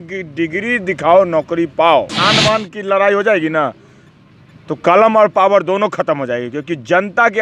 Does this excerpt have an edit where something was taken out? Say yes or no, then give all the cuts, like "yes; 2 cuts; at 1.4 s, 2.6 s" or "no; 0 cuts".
yes; 1 cut; at 2.2 s